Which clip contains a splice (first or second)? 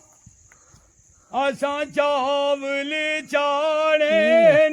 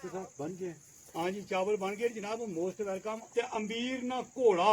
second